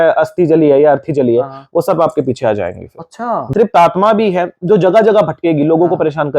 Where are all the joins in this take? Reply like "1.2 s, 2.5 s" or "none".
3.5 s